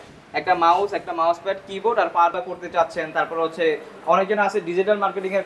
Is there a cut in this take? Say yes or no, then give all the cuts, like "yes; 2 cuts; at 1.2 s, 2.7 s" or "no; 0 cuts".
yes; 1 cut; at 2.4 s